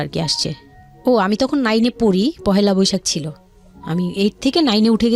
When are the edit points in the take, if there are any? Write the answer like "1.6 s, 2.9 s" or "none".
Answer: none

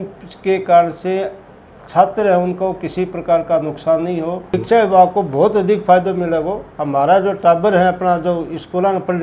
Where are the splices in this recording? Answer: 4.5 s

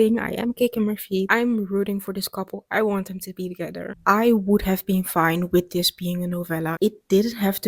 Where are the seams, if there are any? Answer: 1.2 s, 3.8 s, 6.7 s

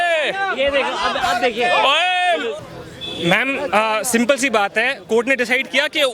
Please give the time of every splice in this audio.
2.6 s

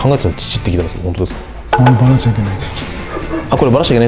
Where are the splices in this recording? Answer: none

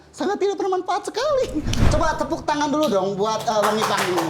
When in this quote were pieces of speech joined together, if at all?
1.7 s

